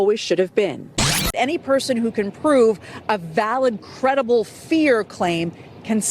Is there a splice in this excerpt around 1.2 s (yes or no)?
yes